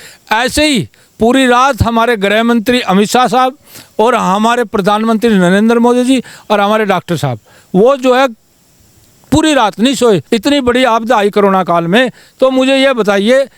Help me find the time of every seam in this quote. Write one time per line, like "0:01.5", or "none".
0:10.2